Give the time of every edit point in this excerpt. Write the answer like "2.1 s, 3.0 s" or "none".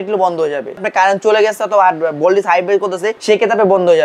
0.8 s, 3.1 s